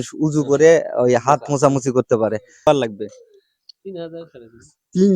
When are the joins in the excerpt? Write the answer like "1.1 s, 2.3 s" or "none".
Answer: 2.7 s